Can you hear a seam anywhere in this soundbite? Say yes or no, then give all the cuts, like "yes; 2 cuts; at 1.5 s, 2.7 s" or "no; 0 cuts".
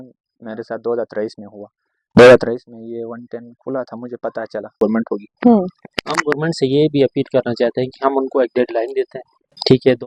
yes; 1 cut; at 4.7 s